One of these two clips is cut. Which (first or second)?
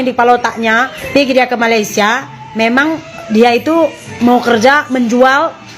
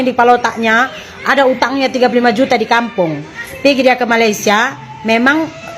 first